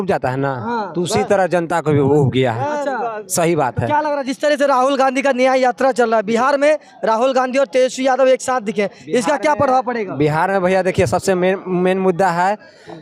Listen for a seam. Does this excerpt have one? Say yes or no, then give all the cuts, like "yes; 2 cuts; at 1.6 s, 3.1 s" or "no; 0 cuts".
no; 0 cuts